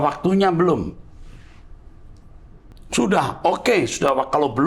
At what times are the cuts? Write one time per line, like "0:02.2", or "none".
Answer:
none